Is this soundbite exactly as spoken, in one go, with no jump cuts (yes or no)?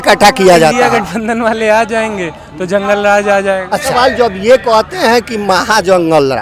no